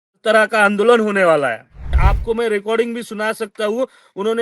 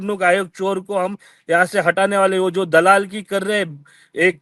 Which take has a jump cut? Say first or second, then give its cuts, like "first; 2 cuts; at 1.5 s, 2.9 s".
first; 1 cut; at 2.0 s